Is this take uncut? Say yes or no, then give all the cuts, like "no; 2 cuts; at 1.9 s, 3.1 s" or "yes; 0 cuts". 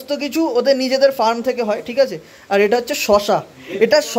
yes; 0 cuts